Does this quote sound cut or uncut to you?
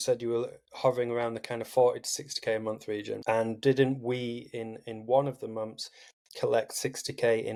uncut